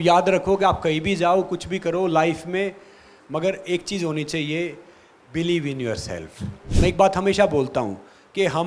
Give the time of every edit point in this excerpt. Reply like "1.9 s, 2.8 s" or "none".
6.6 s